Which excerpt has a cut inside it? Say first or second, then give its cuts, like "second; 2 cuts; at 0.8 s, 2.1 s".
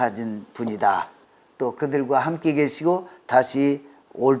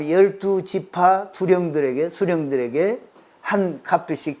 first; 1 cut; at 1.2 s